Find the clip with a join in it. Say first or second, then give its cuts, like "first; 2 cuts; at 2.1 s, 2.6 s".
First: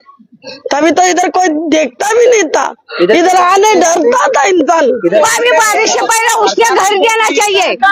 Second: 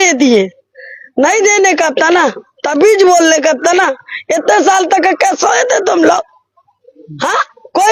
first; 1 cut; at 5.2 s